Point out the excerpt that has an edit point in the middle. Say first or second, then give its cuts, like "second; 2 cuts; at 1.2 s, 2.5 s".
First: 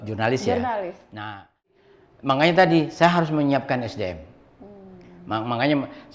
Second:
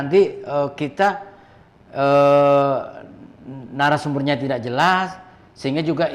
first; 1 cut; at 1.6 s